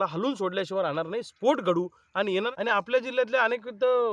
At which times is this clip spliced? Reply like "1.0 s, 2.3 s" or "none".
2.5 s

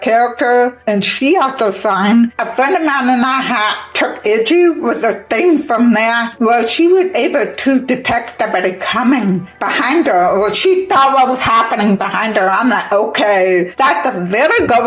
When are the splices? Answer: 6.3 s, 13.7 s

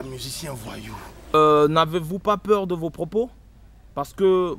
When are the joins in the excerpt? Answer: 1.3 s

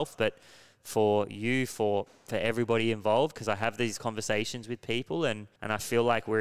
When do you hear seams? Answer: 5.5 s

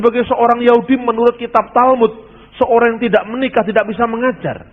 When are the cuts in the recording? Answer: none

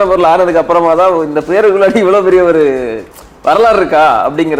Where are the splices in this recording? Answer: none

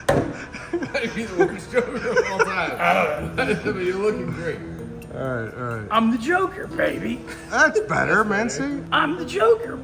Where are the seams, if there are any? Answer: 8.8 s

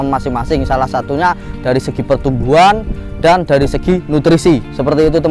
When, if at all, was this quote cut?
none

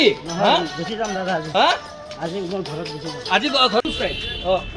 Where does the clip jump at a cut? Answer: 3.8 s

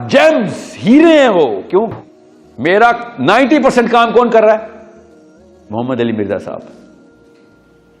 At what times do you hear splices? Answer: 2.0 s, 7.1 s

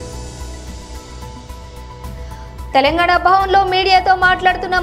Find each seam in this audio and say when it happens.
1.0 s

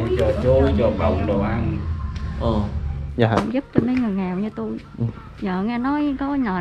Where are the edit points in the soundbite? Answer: 3.1 s

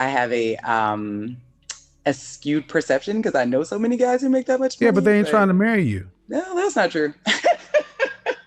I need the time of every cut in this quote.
none

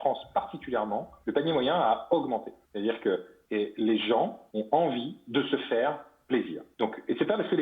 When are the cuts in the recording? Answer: 1.1 s, 2.6 s, 3.4 s, 4.4 s, 6.6 s

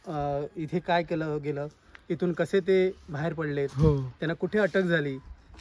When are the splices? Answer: none

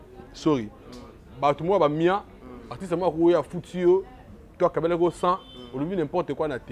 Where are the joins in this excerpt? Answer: none

